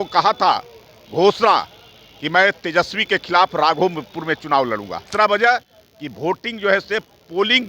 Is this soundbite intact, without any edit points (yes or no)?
no